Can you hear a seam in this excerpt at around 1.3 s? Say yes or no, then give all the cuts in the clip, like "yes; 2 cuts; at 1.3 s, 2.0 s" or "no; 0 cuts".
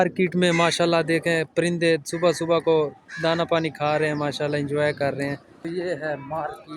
no; 1 cut; at 5.6 s